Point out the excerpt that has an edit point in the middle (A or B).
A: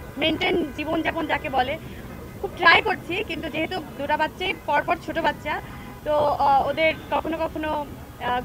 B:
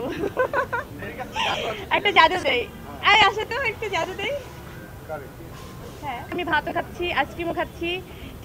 B